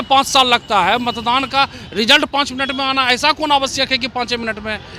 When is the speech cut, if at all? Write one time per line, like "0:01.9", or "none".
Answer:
none